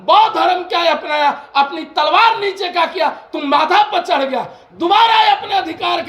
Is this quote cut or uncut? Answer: uncut